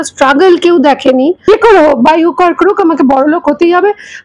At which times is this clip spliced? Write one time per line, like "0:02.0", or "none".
0:01.5